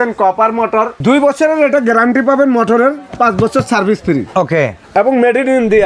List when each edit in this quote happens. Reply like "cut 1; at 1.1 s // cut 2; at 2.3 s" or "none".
cut 1; at 0.9 s // cut 2; at 4.8 s